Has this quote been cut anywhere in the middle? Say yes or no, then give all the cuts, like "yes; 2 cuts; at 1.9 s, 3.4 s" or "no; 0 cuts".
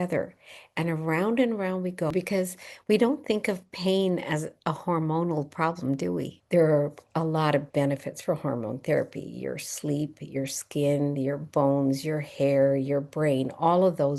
yes; 2 cuts; at 2.1 s, 6.3 s